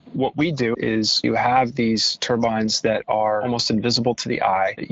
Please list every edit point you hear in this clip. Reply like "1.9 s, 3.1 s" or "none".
1.0 s, 2.1 s, 3.4 s